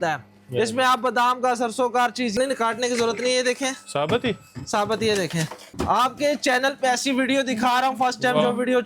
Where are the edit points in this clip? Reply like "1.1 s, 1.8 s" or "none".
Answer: 2.3 s, 5.7 s